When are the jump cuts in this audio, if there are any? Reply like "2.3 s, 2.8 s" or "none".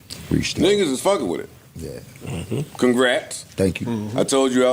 none